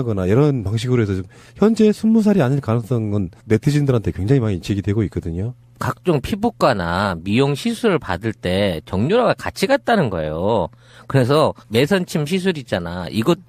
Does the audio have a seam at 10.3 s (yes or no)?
yes